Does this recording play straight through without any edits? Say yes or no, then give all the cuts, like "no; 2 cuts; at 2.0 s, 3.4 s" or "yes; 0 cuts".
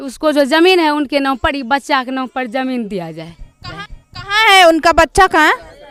yes; 0 cuts